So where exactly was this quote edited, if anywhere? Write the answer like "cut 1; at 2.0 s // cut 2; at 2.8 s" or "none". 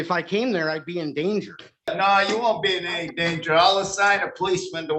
cut 1; at 1.9 s

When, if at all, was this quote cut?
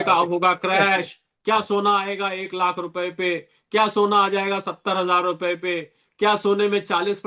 none

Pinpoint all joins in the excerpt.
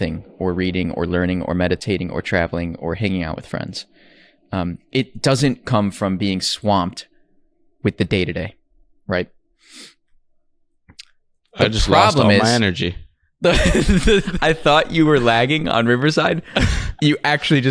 cut 1; at 14.3 s

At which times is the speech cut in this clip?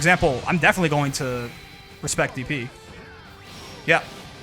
none

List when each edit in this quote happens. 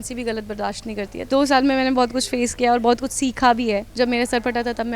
cut 1; at 1.2 s // cut 2; at 3.9 s

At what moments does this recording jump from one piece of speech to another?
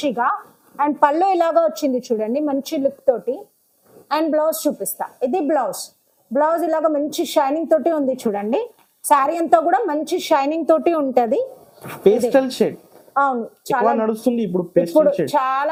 none

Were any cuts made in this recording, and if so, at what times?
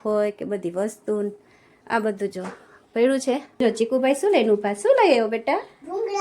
cut 1; at 3.6 s

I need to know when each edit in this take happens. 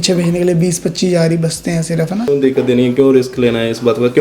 cut 1; at 2.3 s

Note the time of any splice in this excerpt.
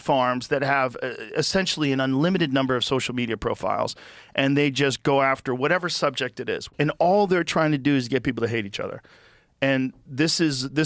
cut 1; at 6.6 s

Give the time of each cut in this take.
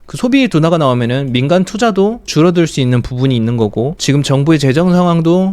cut 1; at 2.3 s // cut 2; at 4.0 s

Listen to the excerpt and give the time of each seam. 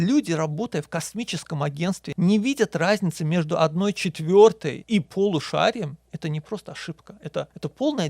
cut 1; at 2.1 s

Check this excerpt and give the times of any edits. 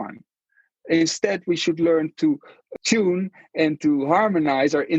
cut 1; at 2.6 s

